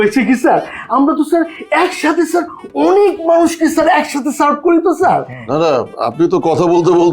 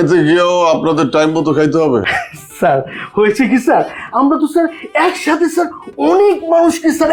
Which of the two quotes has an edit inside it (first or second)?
first